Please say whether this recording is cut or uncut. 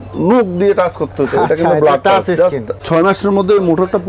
cut